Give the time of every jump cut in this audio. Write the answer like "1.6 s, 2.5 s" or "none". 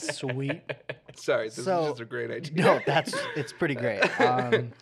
1.1 s